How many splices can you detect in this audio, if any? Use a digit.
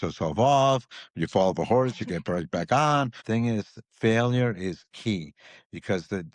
1